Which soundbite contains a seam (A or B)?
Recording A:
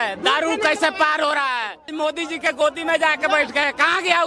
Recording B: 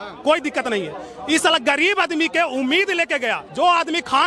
A